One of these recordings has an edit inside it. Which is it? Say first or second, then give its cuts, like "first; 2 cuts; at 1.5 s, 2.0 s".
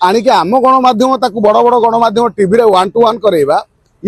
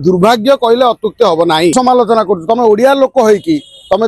second; 1 cut; at 1.7 s